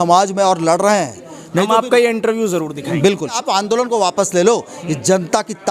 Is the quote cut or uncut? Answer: cut